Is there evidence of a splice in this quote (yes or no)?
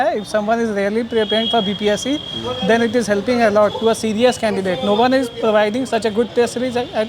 no